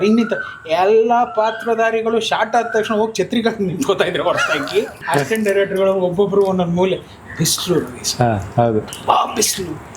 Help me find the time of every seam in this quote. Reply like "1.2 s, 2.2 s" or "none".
5.0 s